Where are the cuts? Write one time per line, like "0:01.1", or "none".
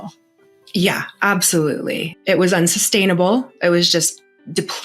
0:02.1